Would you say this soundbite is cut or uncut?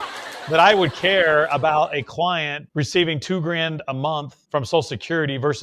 cut